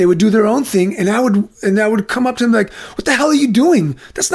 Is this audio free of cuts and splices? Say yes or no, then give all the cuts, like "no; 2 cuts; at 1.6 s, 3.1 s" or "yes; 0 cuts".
yes; 0 cuts